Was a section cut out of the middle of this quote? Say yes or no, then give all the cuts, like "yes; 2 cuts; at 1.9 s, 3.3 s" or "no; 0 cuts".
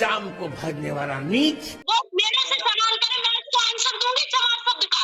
yes; 1 cut; at 1.7 s